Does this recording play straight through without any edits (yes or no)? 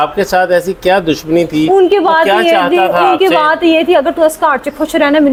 yes